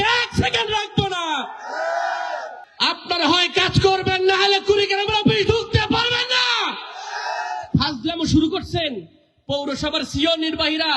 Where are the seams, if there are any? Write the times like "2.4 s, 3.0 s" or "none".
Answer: 2.6 s